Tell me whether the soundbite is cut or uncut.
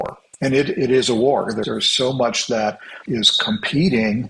cut